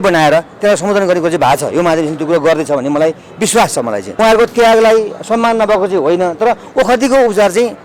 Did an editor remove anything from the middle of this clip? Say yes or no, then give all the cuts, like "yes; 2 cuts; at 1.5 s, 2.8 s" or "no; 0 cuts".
yes; 1 cut; at 4.0 s